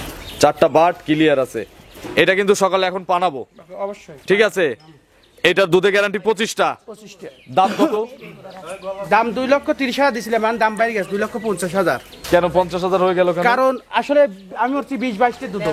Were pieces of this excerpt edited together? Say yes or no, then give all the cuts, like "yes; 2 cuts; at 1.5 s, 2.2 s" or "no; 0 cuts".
no; 0 cuts